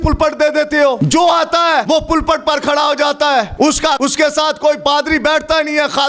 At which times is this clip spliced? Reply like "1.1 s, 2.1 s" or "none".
1.0 s, 1.8 s, 3.8 s, 4.8 s